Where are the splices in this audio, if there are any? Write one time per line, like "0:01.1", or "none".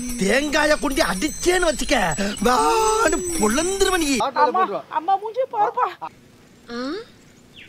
0:04.2